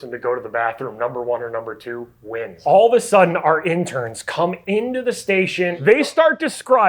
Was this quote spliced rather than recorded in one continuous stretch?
yes; 2 cuts; at 2.6 s, 5.8 s

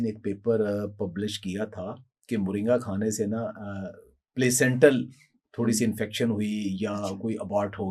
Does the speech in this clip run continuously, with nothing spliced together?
yes; 0 cuts

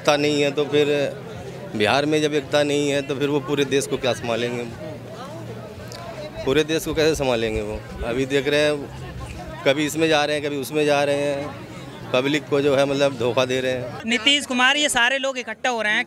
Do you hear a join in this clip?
yes; 1 cut; at 13.9 s

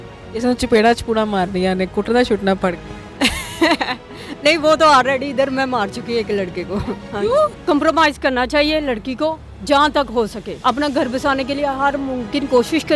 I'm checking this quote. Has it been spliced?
yes; 2 cuts; at 7.6 s, 10.5 s

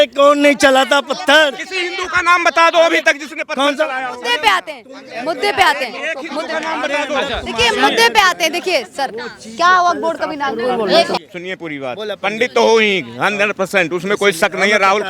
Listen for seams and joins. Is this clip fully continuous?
no; 1 cut; at 11.2 s

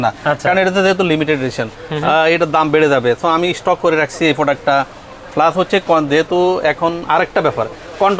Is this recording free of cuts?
yes; 0 cuts

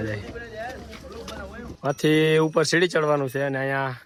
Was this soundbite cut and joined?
no; 0 cuts

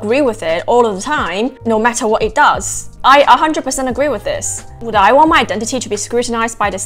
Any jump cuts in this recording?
no; 0 cuts

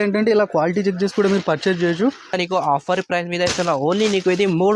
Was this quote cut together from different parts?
yes; 1 cut; at 2.3 s

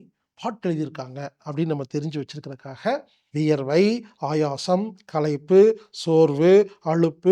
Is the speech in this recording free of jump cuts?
no; 1 cut; at 3.2 s

